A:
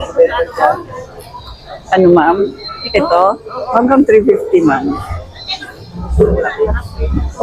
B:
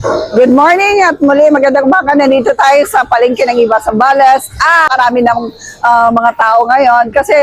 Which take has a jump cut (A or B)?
B